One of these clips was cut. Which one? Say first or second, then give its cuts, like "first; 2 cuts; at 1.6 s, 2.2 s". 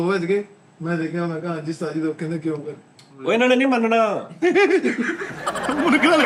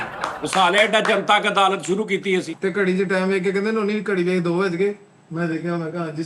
second; 1 cut; at 2.5 s